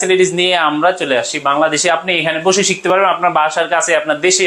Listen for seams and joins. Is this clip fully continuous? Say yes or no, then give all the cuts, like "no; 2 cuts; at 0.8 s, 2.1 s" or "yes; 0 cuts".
yes; 0 cuts